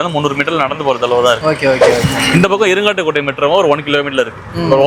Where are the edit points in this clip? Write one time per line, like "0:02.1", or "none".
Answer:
none